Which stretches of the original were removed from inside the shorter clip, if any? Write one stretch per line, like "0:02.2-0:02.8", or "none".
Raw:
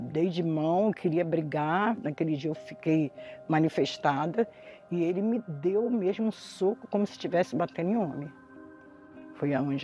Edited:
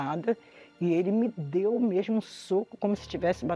none